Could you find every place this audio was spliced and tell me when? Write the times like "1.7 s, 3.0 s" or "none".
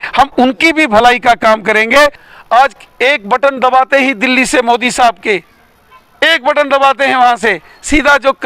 2.2 s

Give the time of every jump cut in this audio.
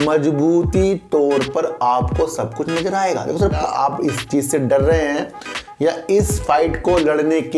3.6 s

